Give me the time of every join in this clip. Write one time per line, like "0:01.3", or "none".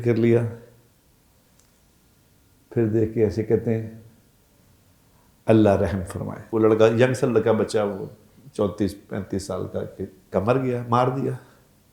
0:06.4
0:10.3